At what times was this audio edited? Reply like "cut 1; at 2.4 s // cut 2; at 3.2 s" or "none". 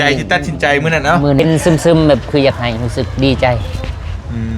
cut 1; at 1.4 s